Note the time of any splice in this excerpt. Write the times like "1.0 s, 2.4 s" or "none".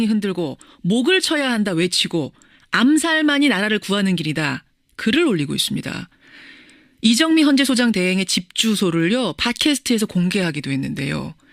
6.9 s